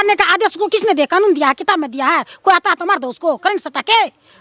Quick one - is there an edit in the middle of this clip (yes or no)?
no